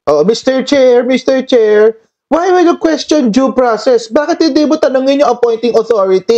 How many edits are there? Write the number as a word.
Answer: zero